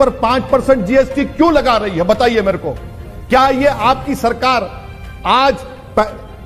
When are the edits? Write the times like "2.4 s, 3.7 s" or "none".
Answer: none